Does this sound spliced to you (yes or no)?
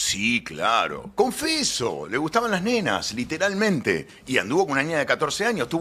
no